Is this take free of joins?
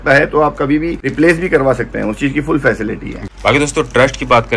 no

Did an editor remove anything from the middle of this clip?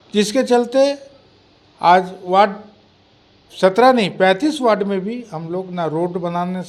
no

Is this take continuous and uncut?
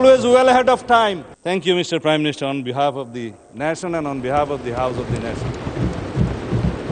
no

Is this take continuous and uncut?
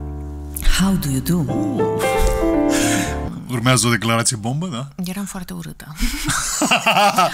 no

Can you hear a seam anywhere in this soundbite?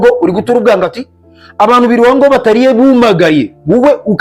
no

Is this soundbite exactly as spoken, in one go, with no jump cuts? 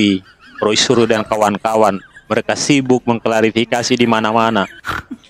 yes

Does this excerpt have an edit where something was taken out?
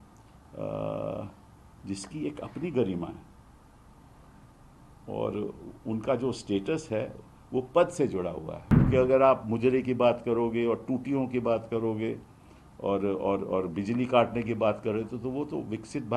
yes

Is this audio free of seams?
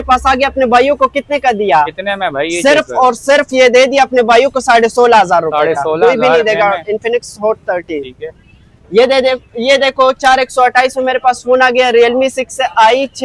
yes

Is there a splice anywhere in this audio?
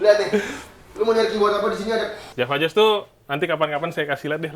yes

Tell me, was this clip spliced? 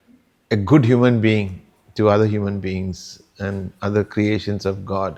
no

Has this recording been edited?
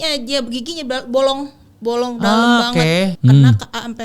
yes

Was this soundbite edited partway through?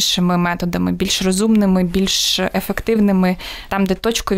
no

